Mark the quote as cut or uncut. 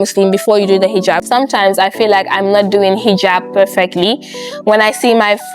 cut